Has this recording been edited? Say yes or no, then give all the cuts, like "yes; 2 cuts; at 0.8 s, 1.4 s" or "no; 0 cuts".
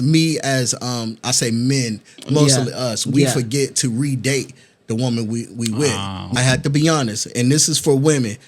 yes; 1 cut; at 6.3 s